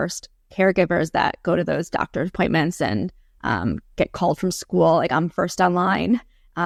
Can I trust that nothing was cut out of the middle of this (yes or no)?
yes